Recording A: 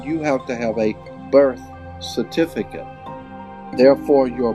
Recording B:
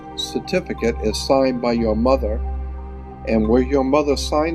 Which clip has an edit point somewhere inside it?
A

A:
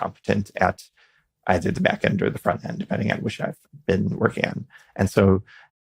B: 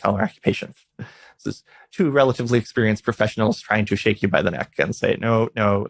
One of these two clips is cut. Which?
A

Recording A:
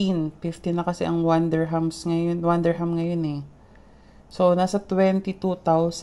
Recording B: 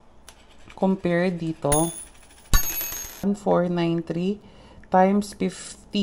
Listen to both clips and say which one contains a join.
B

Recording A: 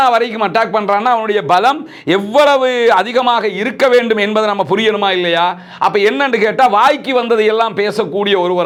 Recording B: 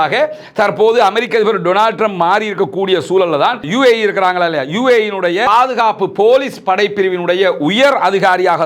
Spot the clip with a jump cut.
B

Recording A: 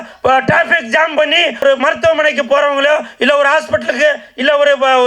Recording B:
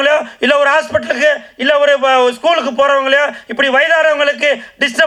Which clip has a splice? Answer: A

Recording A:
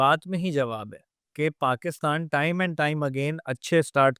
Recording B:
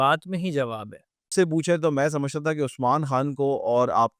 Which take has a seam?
B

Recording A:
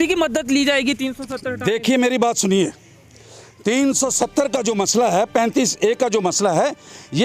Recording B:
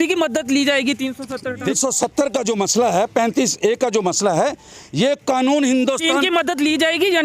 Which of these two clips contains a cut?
B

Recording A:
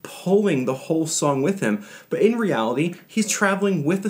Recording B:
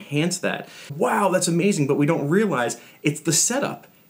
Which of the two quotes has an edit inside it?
B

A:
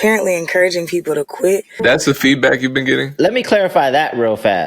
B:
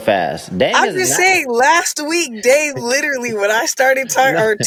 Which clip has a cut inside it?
A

